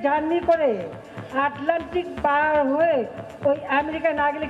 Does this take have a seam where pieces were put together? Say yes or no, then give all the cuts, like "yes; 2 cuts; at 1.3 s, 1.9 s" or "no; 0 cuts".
no; 0 cuts